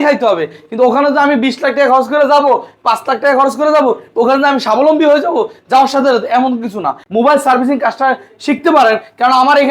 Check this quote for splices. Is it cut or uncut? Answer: cut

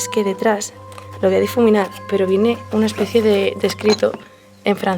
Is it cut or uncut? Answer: uncut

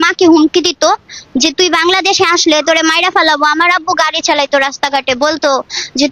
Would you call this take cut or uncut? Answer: uncut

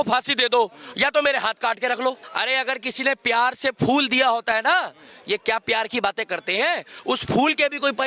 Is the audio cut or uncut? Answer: cut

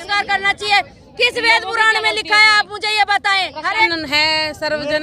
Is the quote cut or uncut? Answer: cut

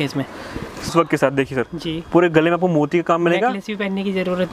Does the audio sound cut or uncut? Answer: cut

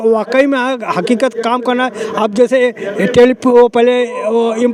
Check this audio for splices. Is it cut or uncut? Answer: uncut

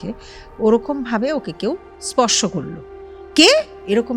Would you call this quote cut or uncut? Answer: cut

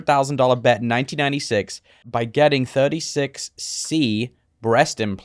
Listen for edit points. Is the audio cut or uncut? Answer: cut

